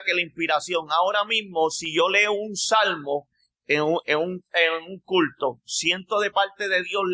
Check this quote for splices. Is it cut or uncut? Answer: uncut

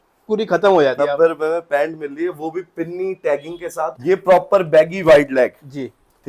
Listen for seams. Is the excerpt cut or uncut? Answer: cut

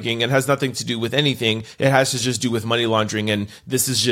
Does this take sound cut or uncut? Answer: uncut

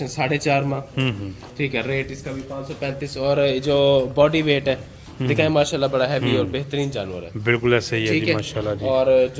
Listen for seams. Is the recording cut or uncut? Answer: uncut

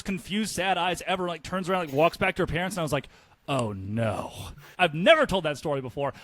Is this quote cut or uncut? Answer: cut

